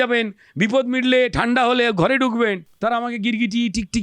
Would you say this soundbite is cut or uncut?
cut